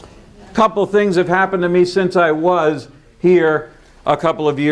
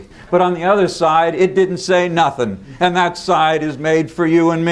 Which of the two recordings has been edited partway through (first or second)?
first